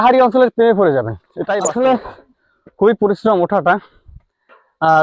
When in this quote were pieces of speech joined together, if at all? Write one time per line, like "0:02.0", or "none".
0:01.3